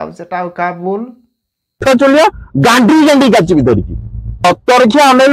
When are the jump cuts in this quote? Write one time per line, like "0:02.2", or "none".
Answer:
0:01.8